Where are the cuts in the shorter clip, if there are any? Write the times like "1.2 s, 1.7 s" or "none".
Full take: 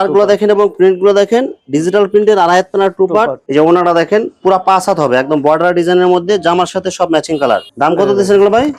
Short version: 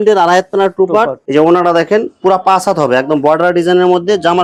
none